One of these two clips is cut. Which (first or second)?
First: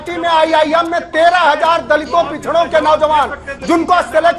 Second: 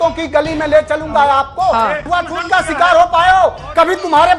second